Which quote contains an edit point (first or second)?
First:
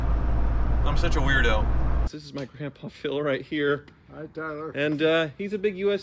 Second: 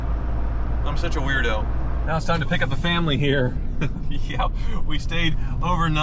first